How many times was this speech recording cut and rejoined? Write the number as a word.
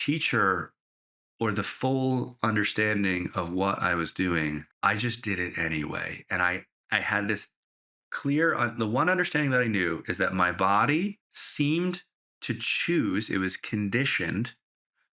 zero